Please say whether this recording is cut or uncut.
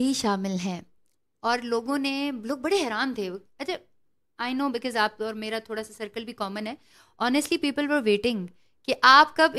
uncut